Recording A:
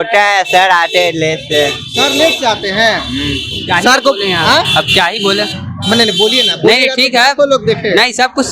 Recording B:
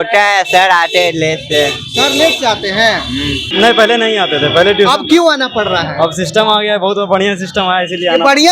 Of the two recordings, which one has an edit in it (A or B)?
B